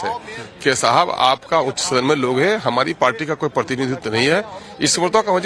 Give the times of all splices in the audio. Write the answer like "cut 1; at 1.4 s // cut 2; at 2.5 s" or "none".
cut 1; at 4.4 s